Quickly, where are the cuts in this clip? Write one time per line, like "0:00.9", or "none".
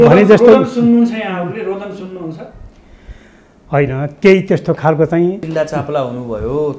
0:05.4

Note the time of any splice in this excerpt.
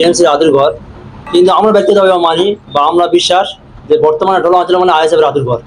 0:01.2

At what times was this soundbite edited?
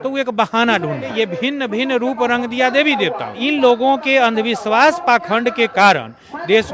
0:01.1
0:03.4

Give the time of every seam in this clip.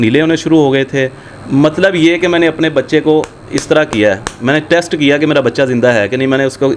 none

